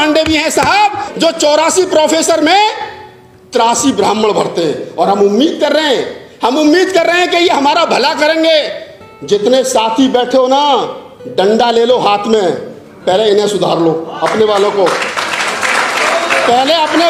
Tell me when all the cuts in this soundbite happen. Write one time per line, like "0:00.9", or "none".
none